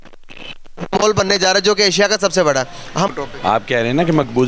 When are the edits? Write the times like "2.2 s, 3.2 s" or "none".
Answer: 3.1 s